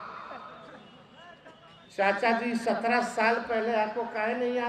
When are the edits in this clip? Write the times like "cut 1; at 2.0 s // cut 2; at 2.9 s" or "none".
none